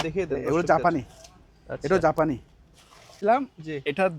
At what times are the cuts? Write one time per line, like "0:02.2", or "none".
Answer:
0:03.2